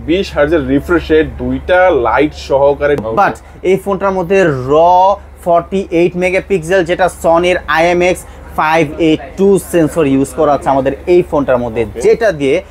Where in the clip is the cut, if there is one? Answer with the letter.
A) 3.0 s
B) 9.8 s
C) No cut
A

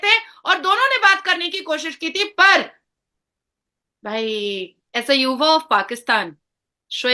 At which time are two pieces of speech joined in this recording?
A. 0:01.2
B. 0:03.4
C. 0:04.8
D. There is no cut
C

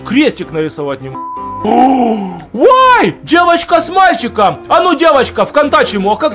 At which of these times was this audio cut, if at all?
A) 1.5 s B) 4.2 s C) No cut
A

